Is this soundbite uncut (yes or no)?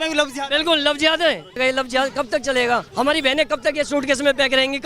no